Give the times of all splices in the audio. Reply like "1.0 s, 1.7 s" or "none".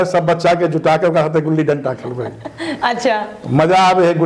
none